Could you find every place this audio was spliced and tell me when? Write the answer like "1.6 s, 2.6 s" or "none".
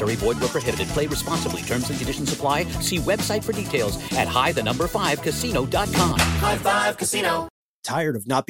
7.6 s